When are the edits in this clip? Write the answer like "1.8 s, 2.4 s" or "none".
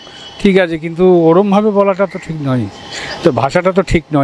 none